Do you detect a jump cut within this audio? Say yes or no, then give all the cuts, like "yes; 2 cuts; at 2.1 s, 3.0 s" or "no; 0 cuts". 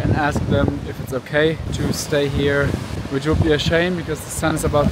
yes; 2 cuts; at 1.7 s, 2.9 s